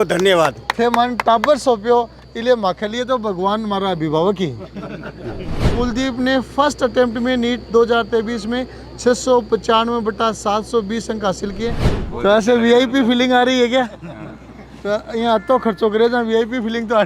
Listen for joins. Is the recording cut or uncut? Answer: cut